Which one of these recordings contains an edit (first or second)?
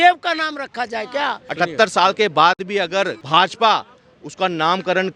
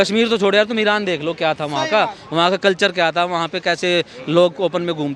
first